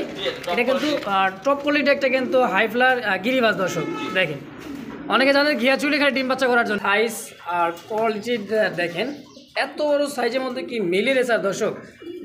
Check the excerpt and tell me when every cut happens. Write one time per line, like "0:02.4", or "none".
0:06.8